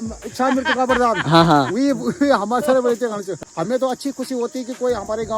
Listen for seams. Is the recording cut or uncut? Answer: cut